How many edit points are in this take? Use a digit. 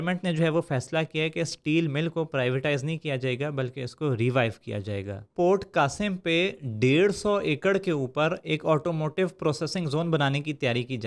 1